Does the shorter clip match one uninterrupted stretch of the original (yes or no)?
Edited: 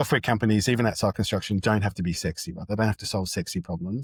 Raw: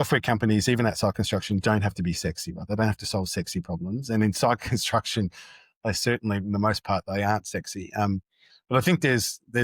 yes